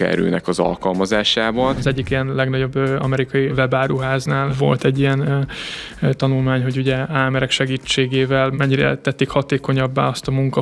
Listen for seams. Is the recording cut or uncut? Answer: cut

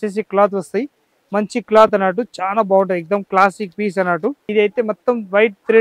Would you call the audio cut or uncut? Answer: cut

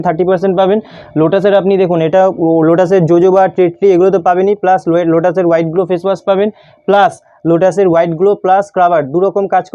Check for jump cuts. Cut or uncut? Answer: uncut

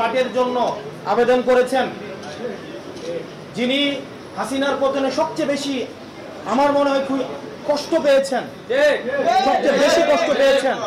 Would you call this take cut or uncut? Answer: uncut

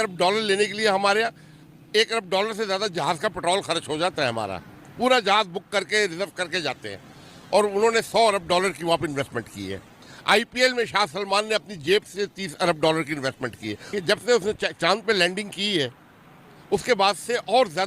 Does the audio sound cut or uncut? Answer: cut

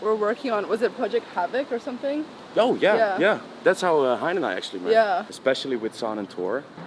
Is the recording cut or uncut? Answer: cut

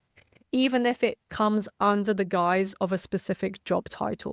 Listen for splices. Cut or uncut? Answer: uncut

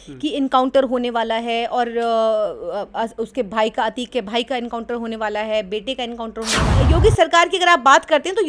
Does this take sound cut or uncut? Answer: cut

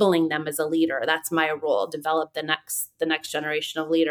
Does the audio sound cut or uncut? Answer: uncut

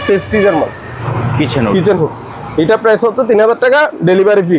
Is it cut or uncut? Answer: cut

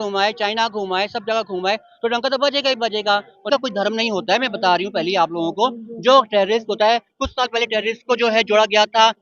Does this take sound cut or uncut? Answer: cut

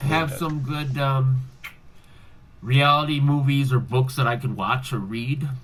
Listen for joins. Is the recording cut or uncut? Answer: uncut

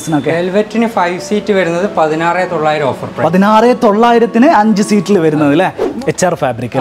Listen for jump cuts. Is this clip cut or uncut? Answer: cut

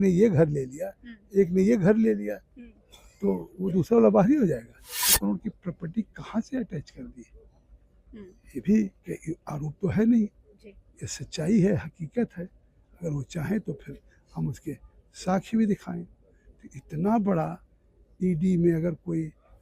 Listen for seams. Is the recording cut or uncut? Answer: cut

